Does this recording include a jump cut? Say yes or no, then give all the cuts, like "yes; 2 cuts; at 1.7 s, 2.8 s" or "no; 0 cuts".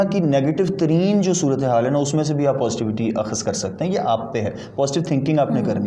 no; 0 cuts